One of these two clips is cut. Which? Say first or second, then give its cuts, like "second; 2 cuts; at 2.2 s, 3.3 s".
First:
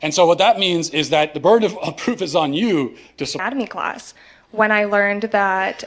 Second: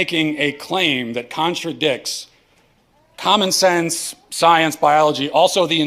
first; 1 cut; at 3.4 s